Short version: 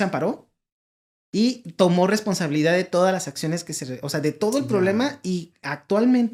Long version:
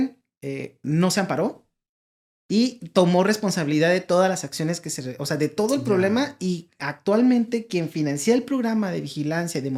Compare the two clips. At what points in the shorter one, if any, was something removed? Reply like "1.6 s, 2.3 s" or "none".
none